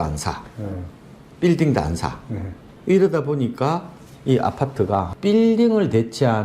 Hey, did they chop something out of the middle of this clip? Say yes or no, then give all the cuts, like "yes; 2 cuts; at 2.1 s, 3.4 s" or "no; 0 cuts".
yes; 1 cut; at 5.1 s